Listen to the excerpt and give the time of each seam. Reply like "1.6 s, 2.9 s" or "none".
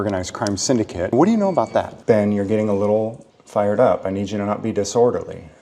1.1 s, 1.9 s